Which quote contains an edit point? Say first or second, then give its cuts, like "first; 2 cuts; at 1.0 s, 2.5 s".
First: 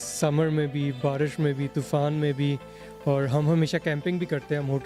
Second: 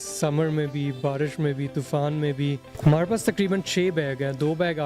second; 1 cut; at 2.7 s